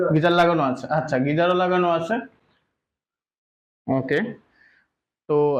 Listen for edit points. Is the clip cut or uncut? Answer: uncut